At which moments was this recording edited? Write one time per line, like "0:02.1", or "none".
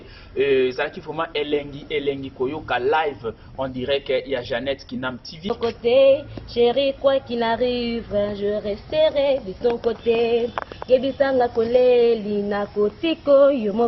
0:05.6